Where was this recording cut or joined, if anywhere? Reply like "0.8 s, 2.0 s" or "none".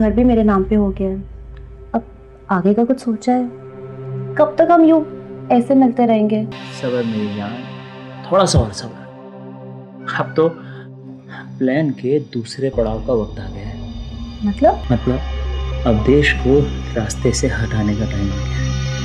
6.6 s, 14.8 s